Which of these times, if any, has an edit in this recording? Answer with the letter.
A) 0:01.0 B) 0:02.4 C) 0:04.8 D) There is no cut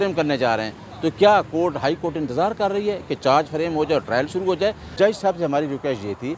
C